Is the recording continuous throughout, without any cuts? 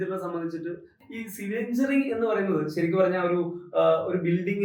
no; 1 cut; at 0.9 s

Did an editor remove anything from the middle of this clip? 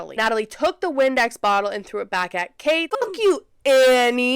yes; 1 cut; at 2.9 s

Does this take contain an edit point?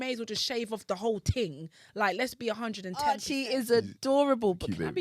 yes; 1 cut; at 3.0 s

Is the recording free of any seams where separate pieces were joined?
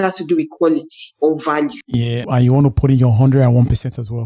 no; 1 cut; at 2.2 s

